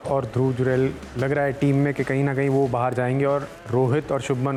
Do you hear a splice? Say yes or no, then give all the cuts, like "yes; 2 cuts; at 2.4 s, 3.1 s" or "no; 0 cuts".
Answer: no; 0 cuts